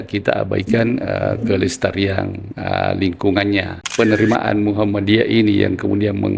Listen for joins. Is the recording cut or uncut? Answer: cut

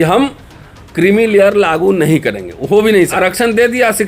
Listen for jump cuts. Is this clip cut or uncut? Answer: cut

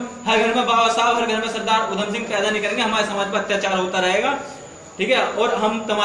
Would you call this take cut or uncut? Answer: uncut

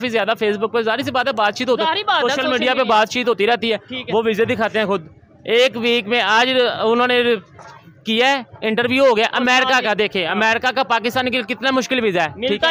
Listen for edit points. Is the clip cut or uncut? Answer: uncut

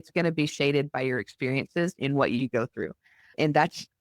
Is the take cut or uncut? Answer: uncut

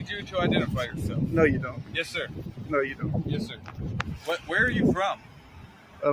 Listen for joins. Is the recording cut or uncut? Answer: uncut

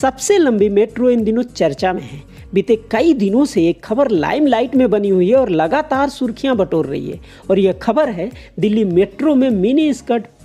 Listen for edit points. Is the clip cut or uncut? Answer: uncut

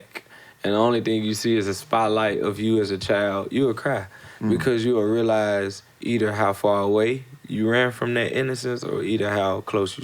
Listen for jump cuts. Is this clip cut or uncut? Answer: uncut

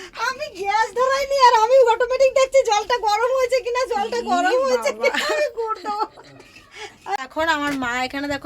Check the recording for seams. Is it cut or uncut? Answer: cut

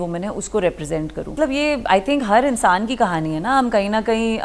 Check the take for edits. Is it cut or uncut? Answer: cut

